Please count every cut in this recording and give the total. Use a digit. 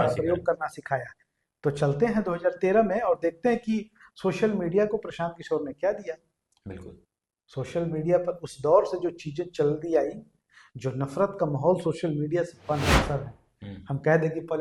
1